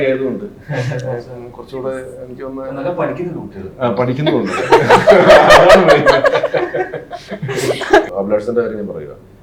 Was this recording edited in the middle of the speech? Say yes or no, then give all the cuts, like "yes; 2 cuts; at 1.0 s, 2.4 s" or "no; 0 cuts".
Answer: yes; 1 cut; at 8.1 s